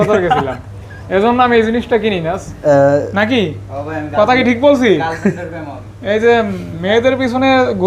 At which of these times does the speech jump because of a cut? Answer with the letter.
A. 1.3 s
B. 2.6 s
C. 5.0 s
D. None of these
B